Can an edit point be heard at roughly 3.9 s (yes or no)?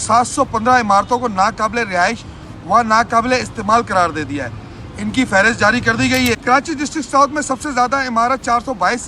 no